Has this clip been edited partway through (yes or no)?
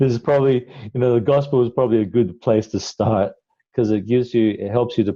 no